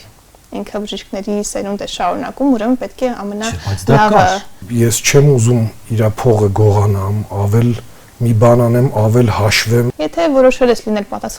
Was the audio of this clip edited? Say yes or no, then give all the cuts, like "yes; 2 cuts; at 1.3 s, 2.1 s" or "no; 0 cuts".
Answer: yes; 2 cuts; at 4.6 s, 9.9 s